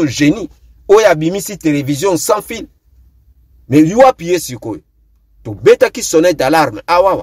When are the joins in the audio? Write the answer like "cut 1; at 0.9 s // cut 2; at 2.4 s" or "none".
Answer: none

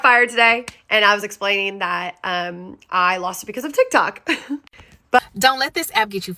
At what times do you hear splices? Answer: cut 1; at 5.2 s

